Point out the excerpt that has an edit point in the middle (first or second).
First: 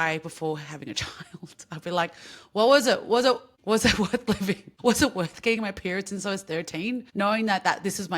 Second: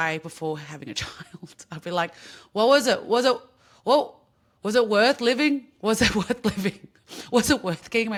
first